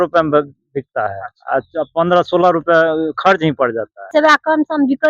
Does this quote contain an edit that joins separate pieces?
yes; 1 cut; at 4.1 s

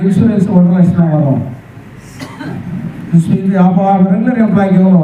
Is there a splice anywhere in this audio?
no; 0 cuts

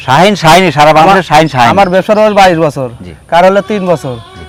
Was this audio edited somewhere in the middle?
no; 0 cuts

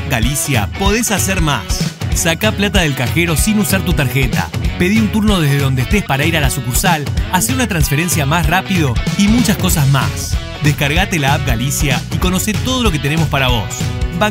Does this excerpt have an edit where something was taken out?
no; 0 cuts

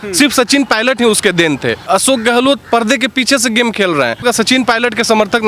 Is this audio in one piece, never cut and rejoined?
no; 2 cuts; at 1.8 s, 4.2 s

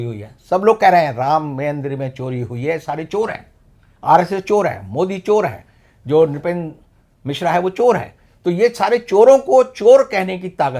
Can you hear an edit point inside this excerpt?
no; 0 cuts

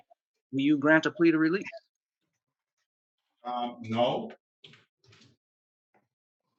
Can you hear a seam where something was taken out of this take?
no; 0 cuts

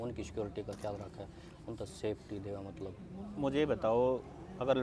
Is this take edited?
no; 0 cuts

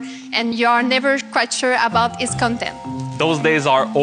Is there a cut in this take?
yes; 1 cut; at 2.9 s

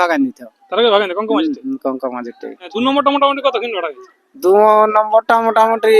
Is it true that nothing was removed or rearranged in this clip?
no; 1 cut; at 2.7 s

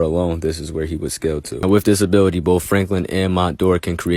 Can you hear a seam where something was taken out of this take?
yes; 1 cut; at 1.5 s

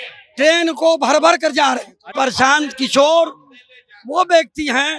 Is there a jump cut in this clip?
yes; 1 cut; at 2.1 s

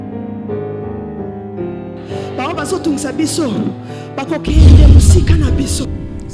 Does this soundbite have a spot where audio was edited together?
no; 0 cuts

